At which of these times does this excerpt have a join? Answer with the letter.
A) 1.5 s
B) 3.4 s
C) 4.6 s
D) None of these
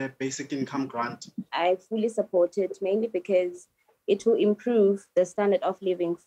A